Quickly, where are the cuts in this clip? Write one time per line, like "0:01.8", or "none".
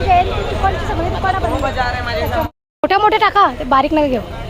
0:02.5